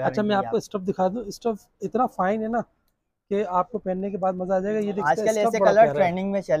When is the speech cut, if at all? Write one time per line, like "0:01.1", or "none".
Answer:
0:05.0